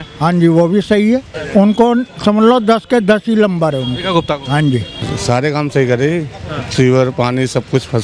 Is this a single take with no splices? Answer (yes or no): no